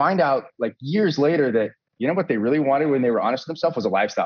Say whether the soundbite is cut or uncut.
uncut